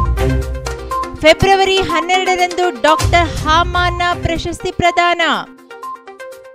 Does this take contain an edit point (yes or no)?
no